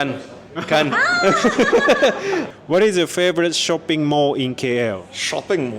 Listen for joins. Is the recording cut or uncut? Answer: cut